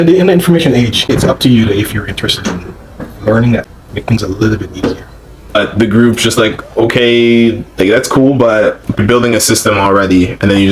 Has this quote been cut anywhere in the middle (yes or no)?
yes